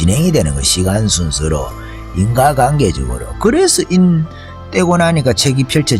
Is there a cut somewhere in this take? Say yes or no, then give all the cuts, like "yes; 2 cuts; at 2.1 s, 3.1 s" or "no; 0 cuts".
no; 0 cuts